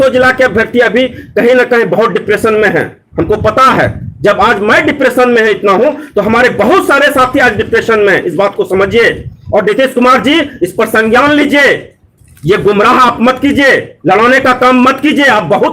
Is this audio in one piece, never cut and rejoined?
yes; 0 cuts

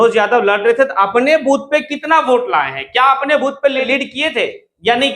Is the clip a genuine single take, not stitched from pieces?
no; 1 cut; at 3.9 s

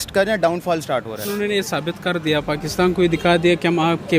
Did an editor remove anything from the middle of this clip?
yes; 1 cut; at 1.2 s

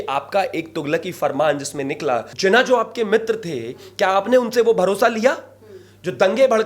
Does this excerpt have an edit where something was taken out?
yes; 1 cut; at 2.3 s

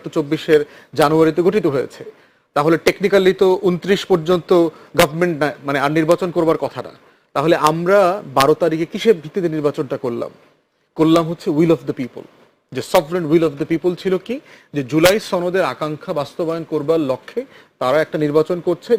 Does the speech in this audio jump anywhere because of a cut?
no; 0 cuts

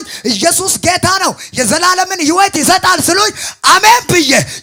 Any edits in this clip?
no; 0 cuts

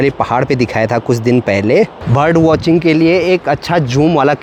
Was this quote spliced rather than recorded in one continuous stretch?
no; 0 cuts

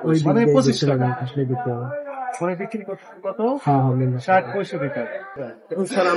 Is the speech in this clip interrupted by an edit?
no; 0 cuts

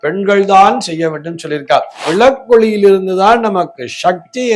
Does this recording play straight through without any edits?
no; 1 cut; at 2.0 s

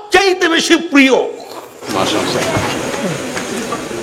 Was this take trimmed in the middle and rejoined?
yes; 1 cut; at 1.9 s

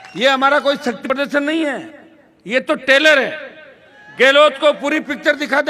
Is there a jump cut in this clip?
yes; 1 cut; at 1.0 s

